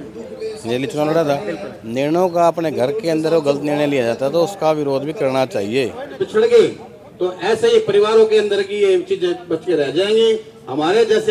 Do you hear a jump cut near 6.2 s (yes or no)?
yes